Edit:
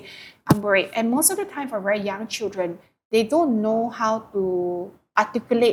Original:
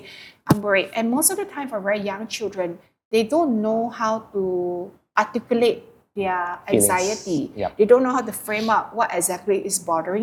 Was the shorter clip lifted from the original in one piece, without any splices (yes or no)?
yes